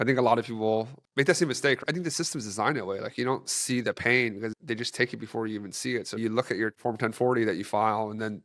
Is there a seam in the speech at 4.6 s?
yes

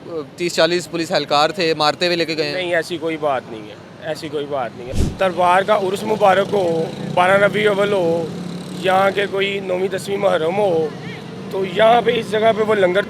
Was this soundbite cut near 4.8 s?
yes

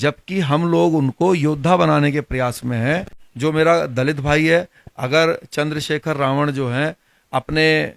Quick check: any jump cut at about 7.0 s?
no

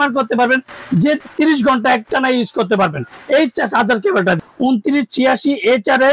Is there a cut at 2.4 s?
no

